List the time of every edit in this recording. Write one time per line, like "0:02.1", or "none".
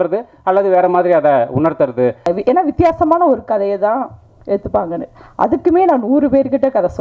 0:02.3